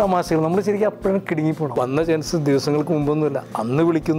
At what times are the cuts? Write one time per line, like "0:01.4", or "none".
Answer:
0:01.7